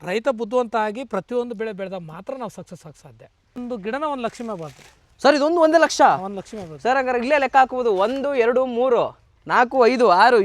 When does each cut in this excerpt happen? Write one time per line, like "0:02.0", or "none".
0:03.6